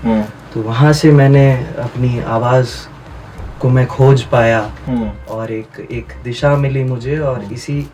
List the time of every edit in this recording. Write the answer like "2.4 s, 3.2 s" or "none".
none